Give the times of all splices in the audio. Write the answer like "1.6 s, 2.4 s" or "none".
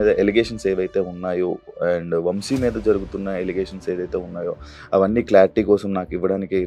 none